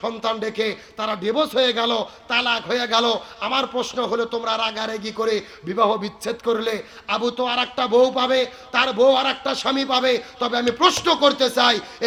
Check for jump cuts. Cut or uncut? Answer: uncut